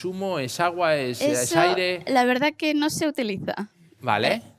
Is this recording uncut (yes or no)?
yes